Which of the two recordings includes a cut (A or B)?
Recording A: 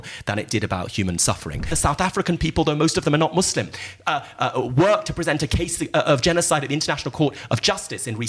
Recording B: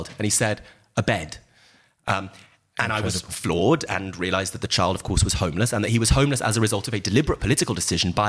A